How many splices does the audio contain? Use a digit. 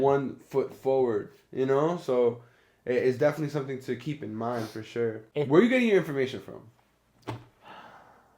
1